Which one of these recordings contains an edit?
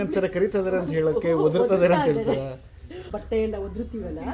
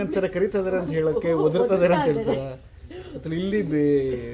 first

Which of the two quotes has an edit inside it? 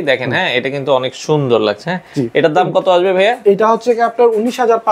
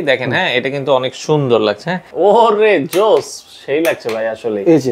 second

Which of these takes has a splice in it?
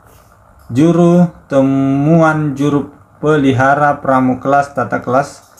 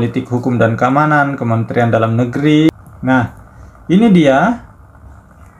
second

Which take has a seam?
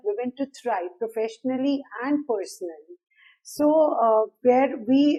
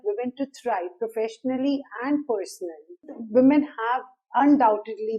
second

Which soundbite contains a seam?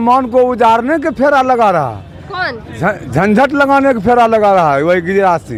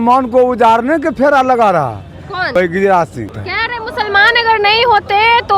second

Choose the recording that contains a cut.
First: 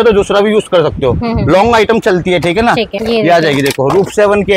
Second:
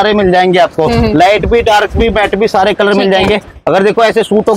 first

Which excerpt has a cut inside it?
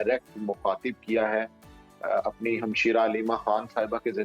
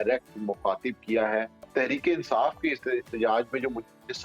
second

